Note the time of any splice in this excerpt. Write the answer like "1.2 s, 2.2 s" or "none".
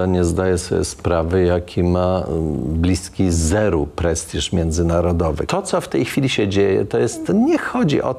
5.4 s